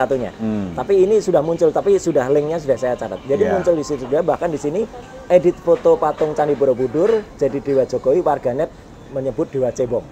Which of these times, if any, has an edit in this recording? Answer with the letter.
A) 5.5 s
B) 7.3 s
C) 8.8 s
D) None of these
D